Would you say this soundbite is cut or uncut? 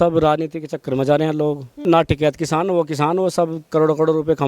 cut